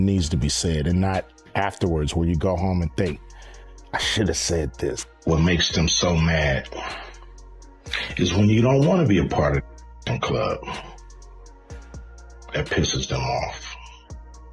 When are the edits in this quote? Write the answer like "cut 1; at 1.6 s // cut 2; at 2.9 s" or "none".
cut 1; at 5.1 s // cut 2; at 13.6 s